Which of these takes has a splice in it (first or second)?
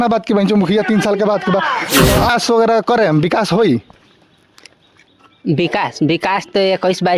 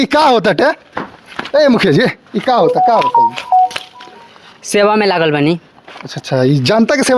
first